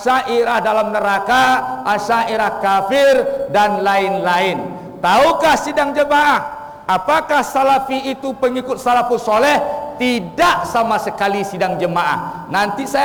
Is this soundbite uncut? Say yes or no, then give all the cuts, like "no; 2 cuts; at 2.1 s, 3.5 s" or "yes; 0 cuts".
yes; 0 cuts